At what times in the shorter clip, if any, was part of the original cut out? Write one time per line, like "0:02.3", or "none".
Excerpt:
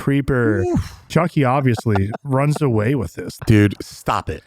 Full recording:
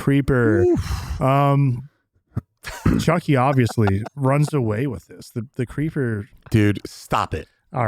0:01.1
0:03.3